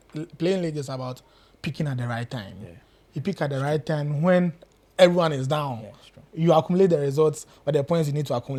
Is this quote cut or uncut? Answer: uncut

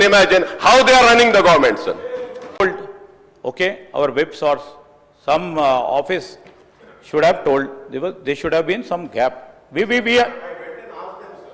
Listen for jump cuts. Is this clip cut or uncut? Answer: uncut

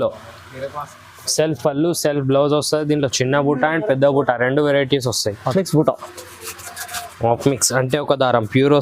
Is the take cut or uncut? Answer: cut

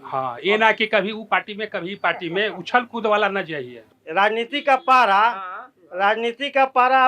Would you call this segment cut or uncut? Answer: cut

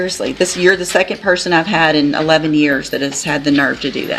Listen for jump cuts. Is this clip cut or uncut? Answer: uncut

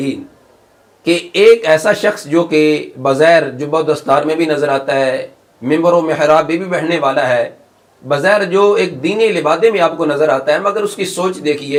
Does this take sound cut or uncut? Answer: uncut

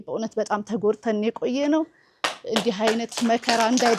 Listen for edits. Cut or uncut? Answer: uncut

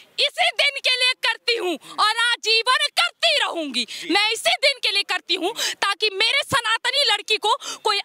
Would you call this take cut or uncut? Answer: uncut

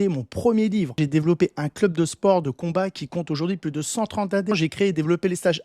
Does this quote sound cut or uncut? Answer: cut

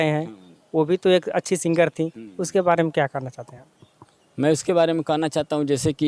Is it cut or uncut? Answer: uncut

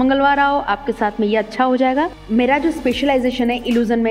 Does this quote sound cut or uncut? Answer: cut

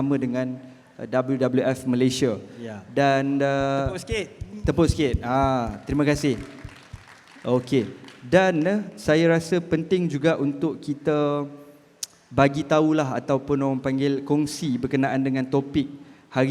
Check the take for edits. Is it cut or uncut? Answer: uncut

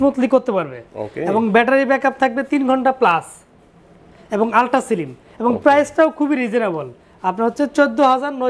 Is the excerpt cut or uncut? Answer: uncut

